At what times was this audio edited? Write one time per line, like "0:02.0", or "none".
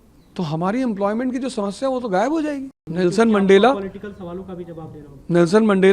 0:02.7

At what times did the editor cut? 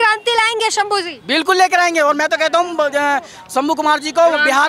none

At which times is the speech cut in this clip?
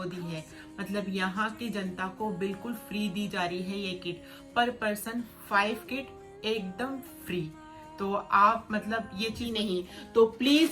0:09.5

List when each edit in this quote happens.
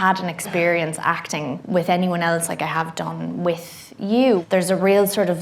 0:04.4

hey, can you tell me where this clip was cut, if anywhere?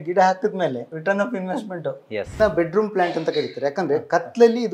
0:00.9
0:02.4

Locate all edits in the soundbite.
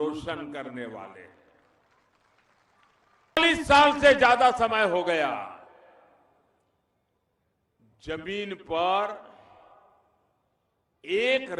0:03.4

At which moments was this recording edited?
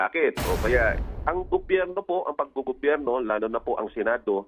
0:01.0

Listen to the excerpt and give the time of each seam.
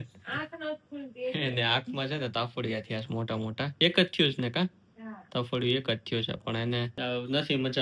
0:03.7
0:06.9

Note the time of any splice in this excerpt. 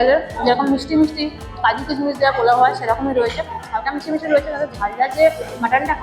none

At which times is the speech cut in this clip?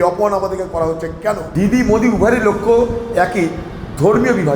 0:01.5

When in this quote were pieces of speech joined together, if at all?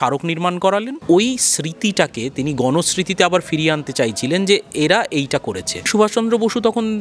0:01.0
0:05.9

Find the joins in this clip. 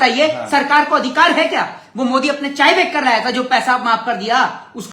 none

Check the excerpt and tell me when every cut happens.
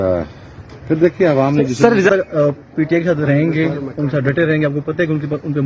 0:02.1

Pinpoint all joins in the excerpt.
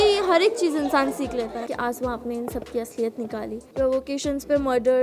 0:01.6
0:03.6

